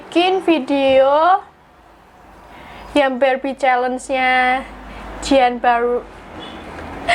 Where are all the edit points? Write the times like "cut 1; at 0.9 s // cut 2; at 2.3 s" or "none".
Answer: none